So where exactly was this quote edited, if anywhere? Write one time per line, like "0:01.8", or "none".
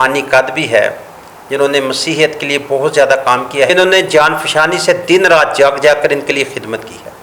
0:03.7